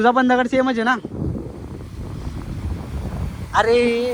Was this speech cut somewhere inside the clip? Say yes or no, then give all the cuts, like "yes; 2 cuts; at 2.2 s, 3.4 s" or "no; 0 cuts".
no; 0 cuts